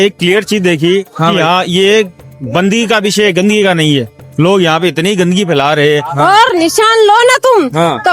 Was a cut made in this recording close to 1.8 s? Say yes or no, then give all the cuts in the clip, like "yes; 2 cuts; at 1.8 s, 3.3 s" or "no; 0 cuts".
no; 1 cut; at 6.1 s